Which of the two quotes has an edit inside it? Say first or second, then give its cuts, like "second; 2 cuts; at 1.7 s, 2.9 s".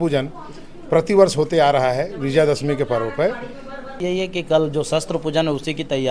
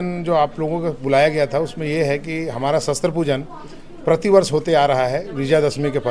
first; 1 cut; at 3.9 s